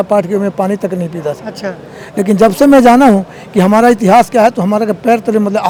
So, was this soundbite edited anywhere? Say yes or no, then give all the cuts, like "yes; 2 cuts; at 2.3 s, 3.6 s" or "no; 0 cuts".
no; 0 cuts